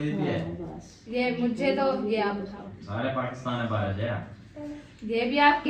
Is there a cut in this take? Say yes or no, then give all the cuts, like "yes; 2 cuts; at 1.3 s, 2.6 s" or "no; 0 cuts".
no; 0 cuts